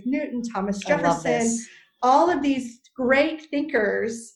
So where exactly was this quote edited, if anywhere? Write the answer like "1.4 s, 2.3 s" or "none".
none